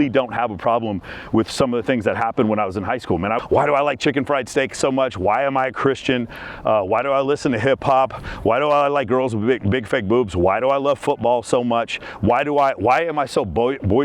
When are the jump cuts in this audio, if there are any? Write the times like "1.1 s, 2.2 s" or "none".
3.4 s